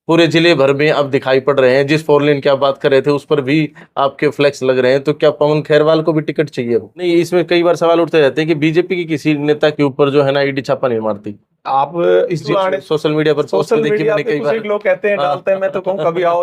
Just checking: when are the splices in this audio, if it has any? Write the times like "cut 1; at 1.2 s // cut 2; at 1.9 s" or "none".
cut 1; at 6.9 s // cut 2; at 12.5 s